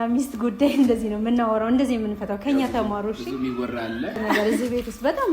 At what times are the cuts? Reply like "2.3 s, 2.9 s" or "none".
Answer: 4.4 s